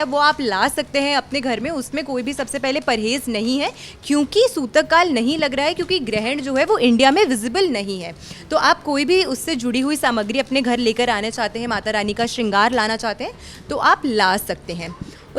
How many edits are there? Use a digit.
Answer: 0